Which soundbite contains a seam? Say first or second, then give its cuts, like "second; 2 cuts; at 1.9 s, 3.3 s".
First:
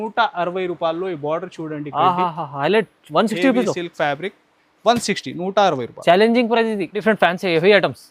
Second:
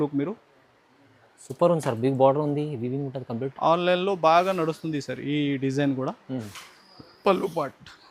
first; 1 cut; at 7.0 s